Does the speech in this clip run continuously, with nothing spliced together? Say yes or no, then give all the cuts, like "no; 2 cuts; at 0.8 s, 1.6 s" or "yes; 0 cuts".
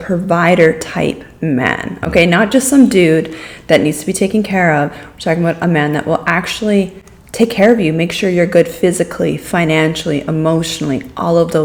yes; 0 cuts